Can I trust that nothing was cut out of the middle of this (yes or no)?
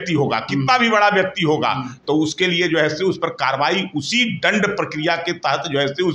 yes